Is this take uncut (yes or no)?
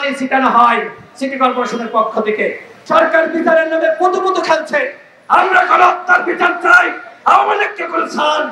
no